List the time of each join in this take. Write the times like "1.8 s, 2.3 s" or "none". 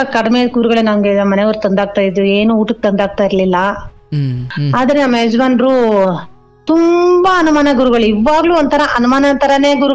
4.5 s